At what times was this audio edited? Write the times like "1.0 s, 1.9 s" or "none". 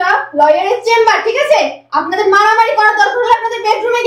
none